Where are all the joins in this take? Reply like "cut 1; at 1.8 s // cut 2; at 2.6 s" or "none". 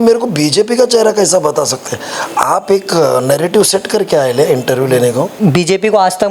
cut 1; at 5.3 s